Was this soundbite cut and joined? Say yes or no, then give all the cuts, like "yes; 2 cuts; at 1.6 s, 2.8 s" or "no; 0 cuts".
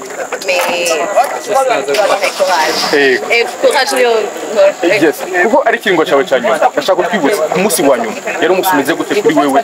no; 0 cuts